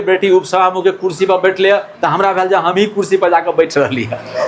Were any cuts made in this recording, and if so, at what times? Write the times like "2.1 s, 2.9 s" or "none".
none